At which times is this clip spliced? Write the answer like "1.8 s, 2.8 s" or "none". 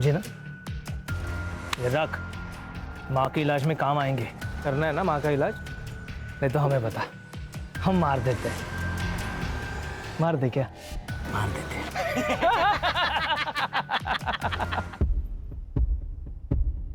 14.9 s

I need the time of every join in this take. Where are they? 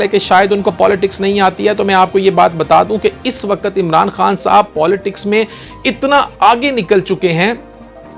none

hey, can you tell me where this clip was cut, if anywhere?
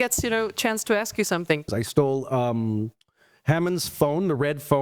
1.7 s

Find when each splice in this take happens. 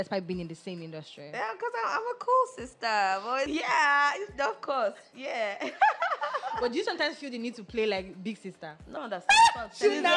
3.5 s, 8.8 s

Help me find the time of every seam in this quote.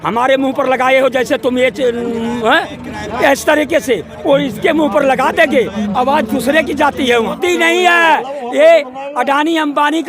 7.4 s

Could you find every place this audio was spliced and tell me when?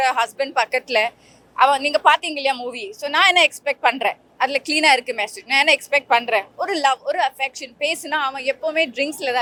none

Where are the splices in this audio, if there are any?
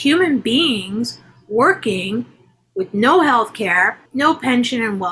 4.0 s

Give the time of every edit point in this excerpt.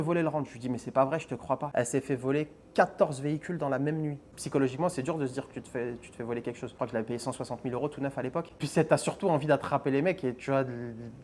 1.7 s, 4.3 s, 6.8 s

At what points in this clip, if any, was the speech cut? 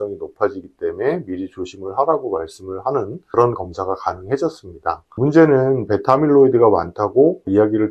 3.2 s, 5.2 s

